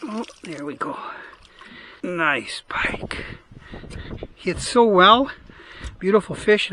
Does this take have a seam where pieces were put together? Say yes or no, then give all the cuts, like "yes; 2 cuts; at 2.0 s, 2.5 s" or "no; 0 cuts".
yes; 1 cut; at 1.8 s